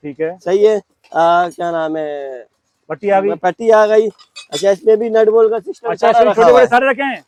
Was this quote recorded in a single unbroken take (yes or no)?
yes